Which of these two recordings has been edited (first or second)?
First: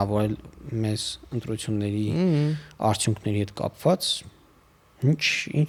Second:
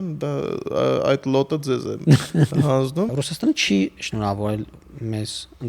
second